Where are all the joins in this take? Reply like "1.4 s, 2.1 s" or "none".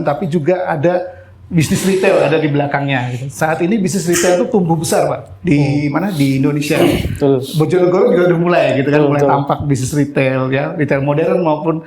none